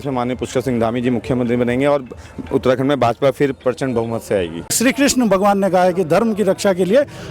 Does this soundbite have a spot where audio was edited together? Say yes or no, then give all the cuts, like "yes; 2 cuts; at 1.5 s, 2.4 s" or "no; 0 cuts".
yes; 1 cut; at 4.8 s